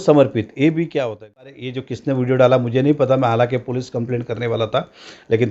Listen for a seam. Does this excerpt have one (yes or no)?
yes